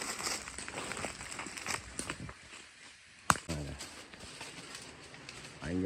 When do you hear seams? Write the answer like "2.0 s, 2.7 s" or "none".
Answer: 3.4 s